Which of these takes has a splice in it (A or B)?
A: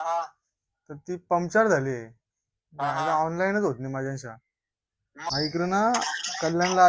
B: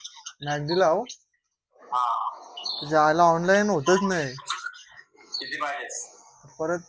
A